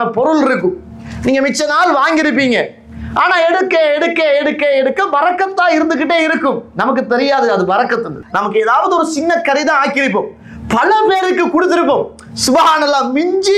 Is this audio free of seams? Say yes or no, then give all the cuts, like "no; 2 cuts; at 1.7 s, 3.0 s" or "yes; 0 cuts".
no; 1 cut; at 8.2 s